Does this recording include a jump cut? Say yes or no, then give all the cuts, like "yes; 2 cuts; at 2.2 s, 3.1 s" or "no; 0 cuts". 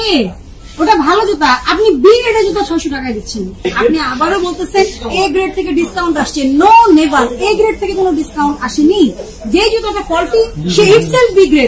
yes; 1 cut; at 3.5 s